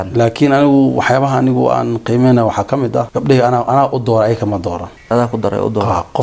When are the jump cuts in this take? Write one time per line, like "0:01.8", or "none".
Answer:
0:03.1
0:04.9